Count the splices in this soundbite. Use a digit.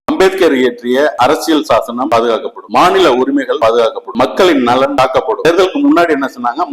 4